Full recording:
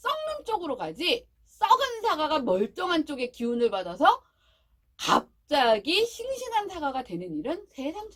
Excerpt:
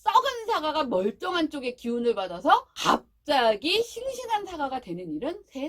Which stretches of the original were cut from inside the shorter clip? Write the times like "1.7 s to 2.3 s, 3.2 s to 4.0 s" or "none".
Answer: 4.3 s to 4.9 s